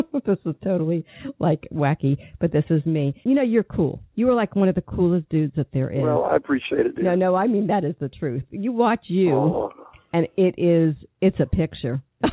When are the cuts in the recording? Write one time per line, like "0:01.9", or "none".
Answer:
0:03.2